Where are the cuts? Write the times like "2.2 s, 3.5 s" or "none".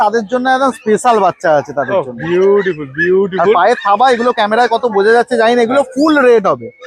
none